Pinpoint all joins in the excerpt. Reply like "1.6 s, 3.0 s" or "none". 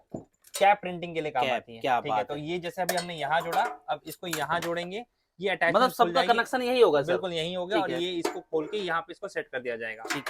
none